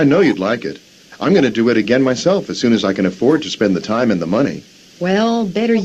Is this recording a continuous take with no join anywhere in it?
yes; 0 cuts

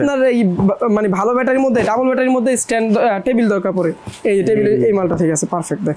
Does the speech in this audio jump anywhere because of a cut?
no; 0 cuts

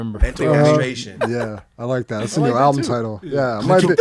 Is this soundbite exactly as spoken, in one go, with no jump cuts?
yes; 0 cuts

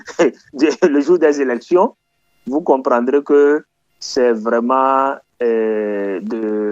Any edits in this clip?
no; 0 cuts

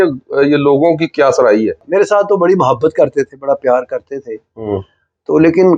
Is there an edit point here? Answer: yes; 1 cut; at 1.9 s

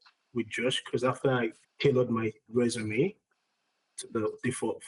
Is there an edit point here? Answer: no; 0 cuts

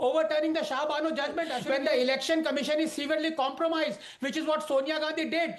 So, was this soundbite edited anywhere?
yes; 1 cut; at 1.6 s

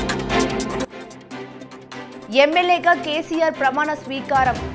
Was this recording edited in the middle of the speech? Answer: no; 0 cuts

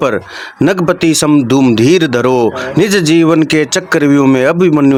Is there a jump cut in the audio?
no; 0 cuts

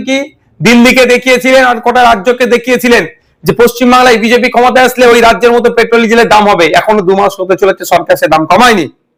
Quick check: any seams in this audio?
no; 0 cuts

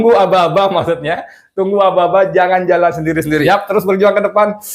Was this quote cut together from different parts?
yes; 1 cut; at 3.4 s

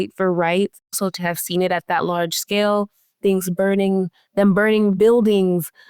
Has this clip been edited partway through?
yes; 1 cut; at 0.9 s

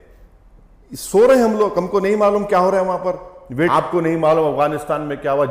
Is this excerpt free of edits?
no; 1 cut; at 3.7 s

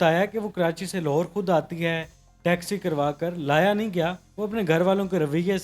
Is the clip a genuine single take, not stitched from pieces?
no; 1 cut; at 4.2 s

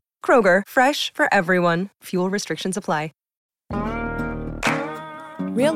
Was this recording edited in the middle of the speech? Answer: yes; 1 cut; at 3.7 s

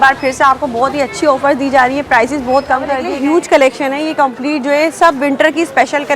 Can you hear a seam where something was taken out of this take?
yes; 1 cut; at 3.1 s

